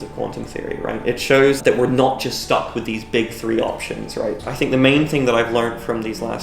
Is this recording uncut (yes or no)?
no